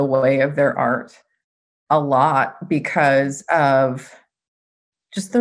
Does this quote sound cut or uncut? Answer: uncut